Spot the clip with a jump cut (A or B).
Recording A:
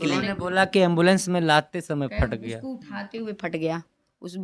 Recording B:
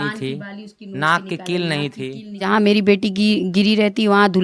B